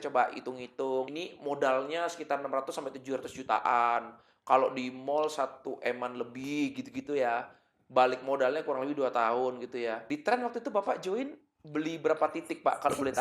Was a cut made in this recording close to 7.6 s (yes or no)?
no